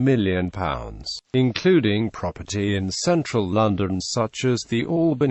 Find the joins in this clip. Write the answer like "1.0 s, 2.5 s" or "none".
3.3 s